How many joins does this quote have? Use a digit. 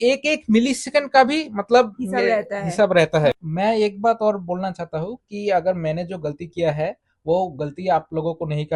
1